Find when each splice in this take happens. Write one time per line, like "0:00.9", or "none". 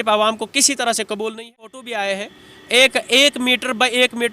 0:01.8